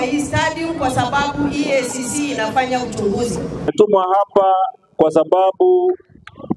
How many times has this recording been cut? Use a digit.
1